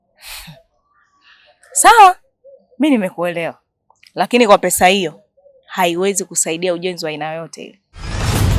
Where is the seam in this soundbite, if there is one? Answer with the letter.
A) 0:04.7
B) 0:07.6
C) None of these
B